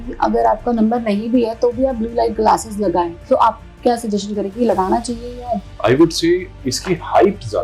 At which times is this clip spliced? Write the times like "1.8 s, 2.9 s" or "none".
5.5 s, 6.6 s